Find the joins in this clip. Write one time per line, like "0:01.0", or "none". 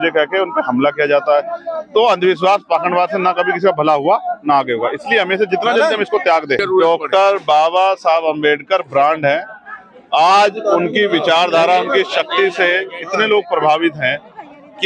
0:06.6